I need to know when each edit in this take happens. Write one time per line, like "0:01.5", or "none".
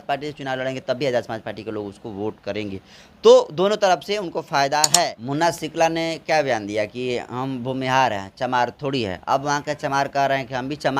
0:05.2

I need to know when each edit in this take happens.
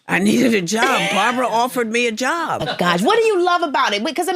0:02.7

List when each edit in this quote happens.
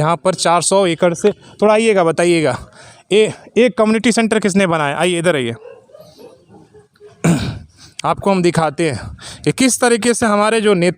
none

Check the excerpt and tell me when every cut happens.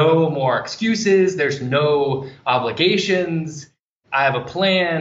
0:03.9

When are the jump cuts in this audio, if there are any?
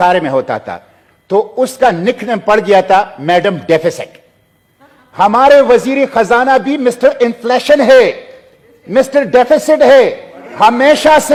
none

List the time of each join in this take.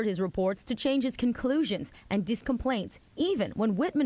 0:02.4

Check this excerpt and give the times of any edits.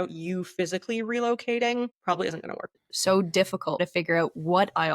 0:02.8
0:03.8

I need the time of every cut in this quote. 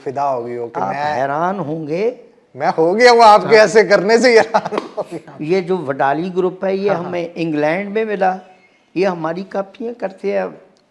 0:05.3

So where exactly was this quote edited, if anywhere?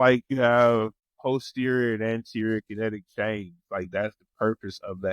0:01.0

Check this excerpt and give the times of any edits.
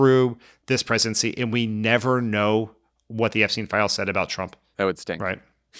0:04.6

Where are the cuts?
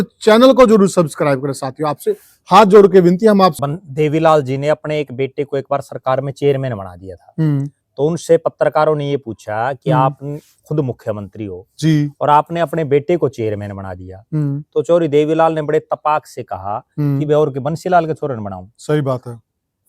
0:03.6

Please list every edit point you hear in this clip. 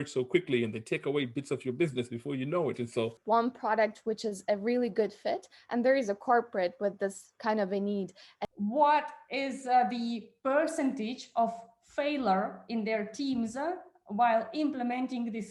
0:03.2
0:08.3

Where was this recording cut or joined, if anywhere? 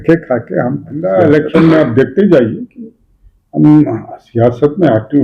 0:01.0

